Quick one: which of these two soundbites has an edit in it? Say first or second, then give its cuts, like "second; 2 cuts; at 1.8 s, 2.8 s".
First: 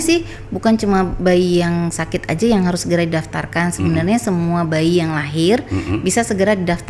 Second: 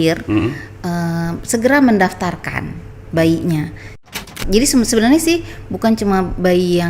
second; 1 cut; at 4.0 s